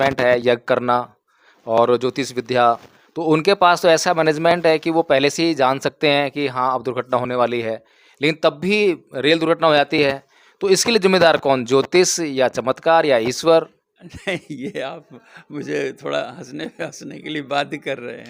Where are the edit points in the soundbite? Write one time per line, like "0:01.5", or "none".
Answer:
none